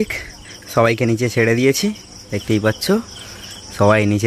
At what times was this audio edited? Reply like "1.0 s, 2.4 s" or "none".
none